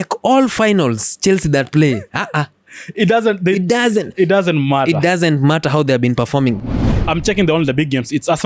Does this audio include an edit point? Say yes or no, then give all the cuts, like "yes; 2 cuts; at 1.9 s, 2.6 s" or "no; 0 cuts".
yes; 1 cut; at 6.6 s